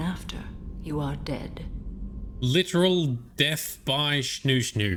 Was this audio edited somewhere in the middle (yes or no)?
no